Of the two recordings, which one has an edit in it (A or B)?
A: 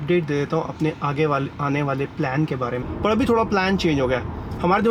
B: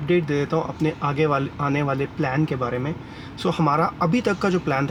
A